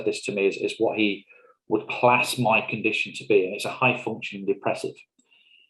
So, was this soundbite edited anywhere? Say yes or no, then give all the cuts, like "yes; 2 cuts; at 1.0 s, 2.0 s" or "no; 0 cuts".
no; 0 cuts